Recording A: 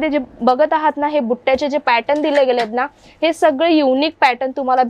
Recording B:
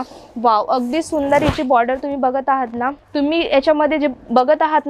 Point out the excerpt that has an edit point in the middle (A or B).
B